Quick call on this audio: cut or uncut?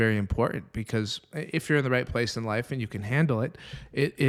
uncut